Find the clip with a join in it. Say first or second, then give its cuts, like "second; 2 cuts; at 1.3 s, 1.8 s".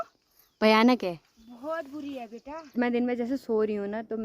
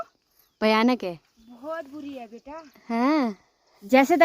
first; 1 cut; at 2.6 s